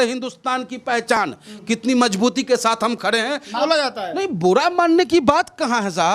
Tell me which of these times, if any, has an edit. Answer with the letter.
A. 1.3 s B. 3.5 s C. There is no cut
C